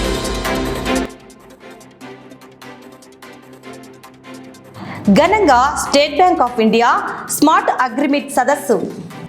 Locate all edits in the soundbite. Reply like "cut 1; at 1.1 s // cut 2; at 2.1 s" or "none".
cut 1; at 1.0 s